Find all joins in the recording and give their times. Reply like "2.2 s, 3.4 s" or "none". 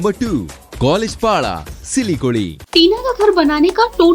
2.6 s